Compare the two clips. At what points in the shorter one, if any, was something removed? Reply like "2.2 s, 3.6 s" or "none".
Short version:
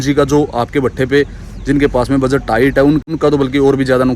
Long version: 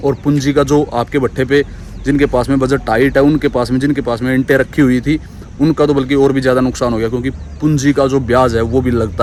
3.1 s